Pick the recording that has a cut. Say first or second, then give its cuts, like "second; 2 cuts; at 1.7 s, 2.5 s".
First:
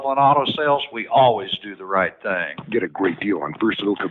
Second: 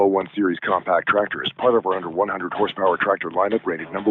first; 1 cut; at 2.5 s